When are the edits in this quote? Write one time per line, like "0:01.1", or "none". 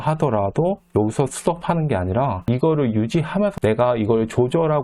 0:02.4
0:03.6